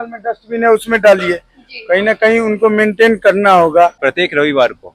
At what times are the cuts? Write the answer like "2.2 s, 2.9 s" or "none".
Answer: 4.0 s